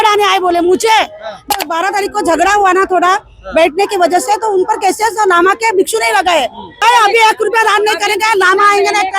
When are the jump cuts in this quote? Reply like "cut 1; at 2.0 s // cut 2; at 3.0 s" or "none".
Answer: cut 1; at 1.6 s // cut 2; at 6.7 s